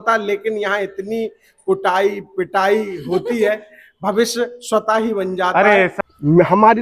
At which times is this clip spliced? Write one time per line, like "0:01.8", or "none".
0:05.9